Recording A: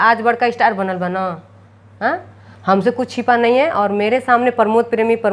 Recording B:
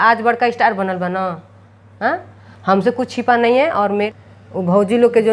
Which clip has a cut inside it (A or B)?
B